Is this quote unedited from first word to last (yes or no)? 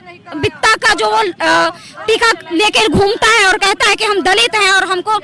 yes